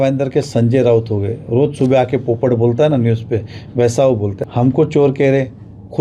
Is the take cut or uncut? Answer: cut